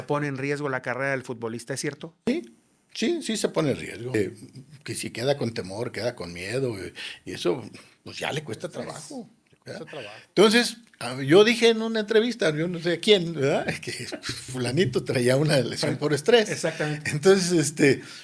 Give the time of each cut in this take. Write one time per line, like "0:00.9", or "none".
0:04.1
0:09.8